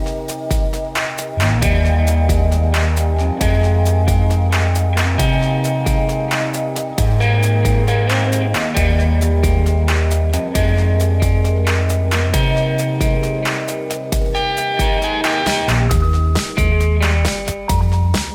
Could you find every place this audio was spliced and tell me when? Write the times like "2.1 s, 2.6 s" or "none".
none

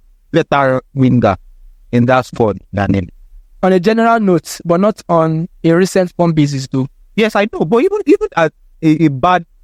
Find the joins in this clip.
none

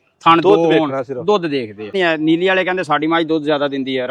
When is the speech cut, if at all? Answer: 1.9 s

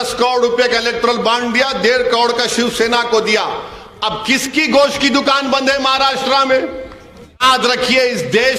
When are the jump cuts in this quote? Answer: 7.4 s

